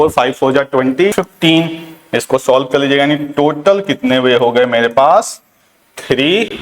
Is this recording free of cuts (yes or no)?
no